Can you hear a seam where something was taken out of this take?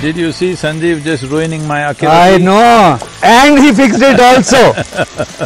yes; 1 cut; at 3.1 s

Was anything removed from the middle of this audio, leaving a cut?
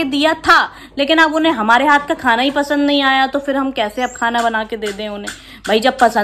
no; 0 cuts

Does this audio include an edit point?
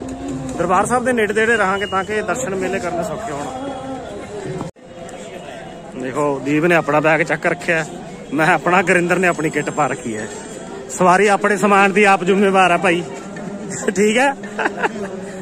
yes; 1 cut; at 4.8 s

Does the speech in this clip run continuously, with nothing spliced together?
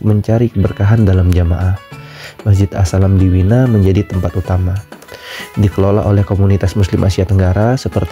yes; 0 cuts

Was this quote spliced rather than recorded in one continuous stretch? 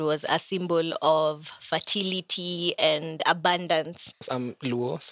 yes; 1 cut; at 4.2 s

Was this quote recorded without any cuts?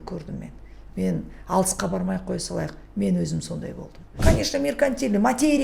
no; 1 cut; at 4.2 s

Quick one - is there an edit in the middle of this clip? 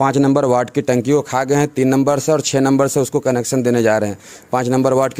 no; 0 cuts

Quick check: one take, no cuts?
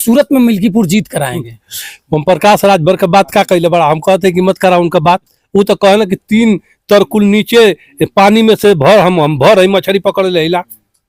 yes; 0 cuts

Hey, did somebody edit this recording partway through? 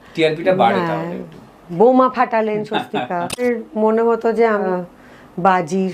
yes; 2 cuts; at 3.4 s, 4.7 s

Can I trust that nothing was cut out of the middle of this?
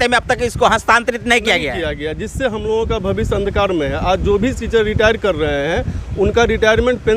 yes; 0 cuts

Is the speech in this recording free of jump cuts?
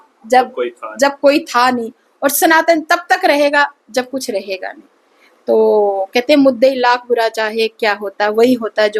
yes; 0 cuts

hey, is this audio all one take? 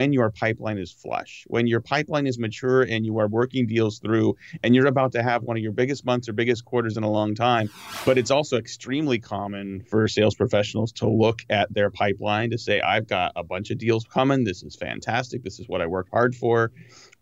no; 2 cuts; at 7.8 s, 9.9 s

